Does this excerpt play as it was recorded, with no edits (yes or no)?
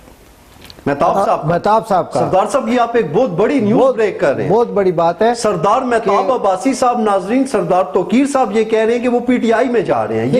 yes